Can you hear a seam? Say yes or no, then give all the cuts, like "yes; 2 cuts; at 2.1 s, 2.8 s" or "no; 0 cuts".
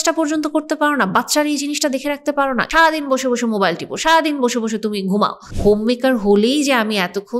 yes; 2 cuts; at 2.7 s, 5.4 s